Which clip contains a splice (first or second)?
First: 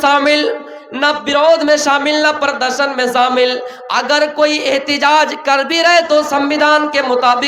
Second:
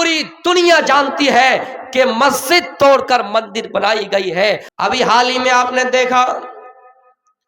second